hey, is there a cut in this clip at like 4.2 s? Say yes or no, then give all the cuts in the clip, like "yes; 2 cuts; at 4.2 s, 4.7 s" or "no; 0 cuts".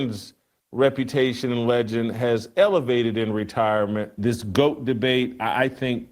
yes; 1 cut; at 4.2 s